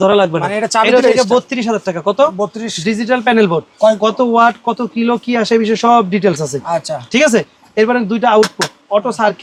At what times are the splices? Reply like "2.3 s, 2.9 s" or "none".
none